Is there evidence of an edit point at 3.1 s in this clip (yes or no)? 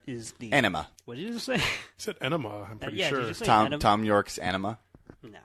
no